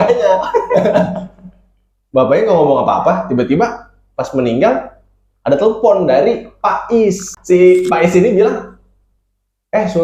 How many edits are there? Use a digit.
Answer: 1